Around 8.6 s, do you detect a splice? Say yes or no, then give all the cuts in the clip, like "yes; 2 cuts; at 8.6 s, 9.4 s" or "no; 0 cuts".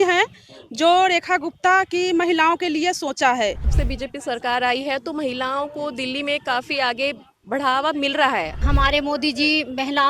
yes; 2 cuts; at 3.7 s, 8.6 s